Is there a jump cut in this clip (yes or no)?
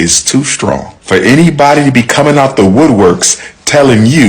yes